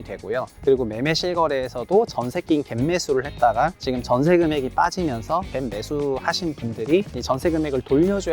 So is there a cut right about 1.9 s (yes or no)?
no